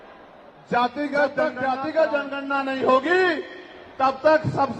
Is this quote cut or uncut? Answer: cut